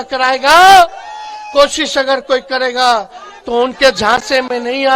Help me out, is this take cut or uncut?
uncut